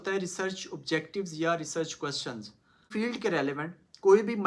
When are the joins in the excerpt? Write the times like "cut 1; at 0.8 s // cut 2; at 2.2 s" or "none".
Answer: cut 1; at 2.9 s